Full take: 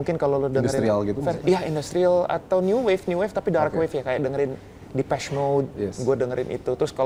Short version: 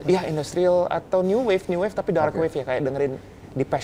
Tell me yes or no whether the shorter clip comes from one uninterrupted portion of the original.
yes